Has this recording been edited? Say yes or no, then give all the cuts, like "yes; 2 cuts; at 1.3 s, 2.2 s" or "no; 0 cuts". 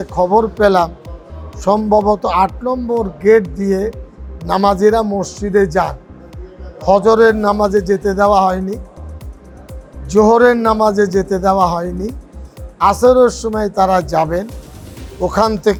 no; 0 cuts